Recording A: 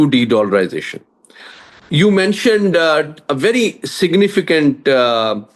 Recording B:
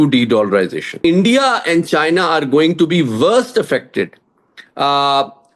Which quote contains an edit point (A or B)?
B